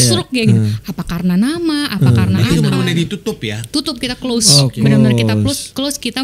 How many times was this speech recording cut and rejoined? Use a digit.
1